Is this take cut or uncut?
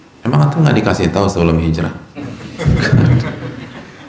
uncut